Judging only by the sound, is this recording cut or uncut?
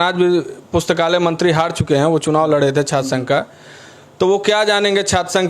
uncut